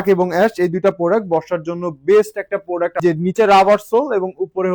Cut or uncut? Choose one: cut